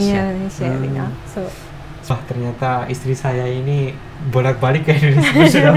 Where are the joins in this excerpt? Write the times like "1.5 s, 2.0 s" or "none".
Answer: 2.1 s